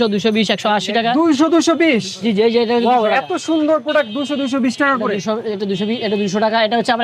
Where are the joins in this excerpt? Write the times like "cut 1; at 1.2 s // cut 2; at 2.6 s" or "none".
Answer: none